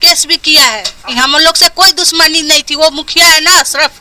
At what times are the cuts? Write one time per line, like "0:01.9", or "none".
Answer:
0:01.1